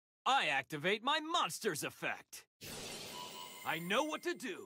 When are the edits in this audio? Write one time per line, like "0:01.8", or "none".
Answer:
0:02.4
0:03.5